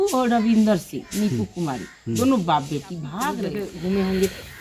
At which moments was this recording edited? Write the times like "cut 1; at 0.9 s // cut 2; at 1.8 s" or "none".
cut 1; at 3.5 s